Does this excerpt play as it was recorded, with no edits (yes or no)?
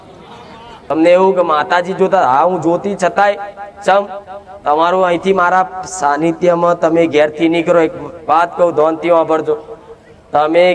no